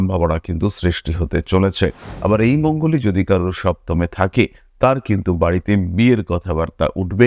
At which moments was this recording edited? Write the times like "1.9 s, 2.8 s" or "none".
2.1 s